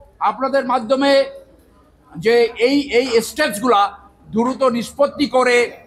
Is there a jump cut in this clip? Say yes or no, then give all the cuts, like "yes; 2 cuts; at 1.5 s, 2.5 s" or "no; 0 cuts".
no; 0 cuts